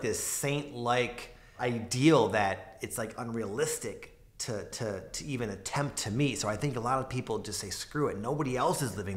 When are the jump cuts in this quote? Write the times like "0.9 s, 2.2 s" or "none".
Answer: 1.5 s